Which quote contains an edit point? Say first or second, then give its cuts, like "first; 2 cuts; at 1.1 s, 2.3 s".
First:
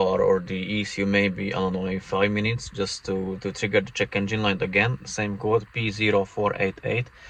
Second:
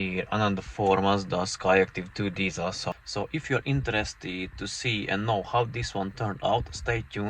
second; 1 cut; at 2.9 s